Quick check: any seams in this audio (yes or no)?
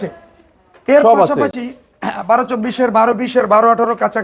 no